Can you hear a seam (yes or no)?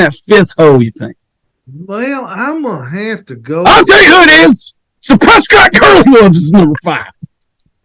no